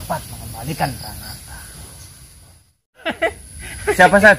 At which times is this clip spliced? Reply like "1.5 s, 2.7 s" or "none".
3.0 s